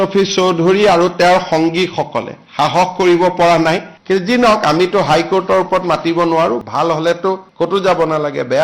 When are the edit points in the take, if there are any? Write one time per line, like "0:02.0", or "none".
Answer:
0:03.9
0:06.6